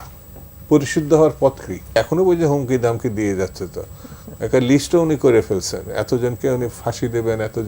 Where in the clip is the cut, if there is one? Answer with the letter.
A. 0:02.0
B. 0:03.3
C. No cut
A